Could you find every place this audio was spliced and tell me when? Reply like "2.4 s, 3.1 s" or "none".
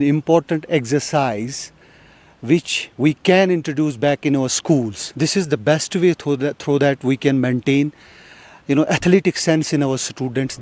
none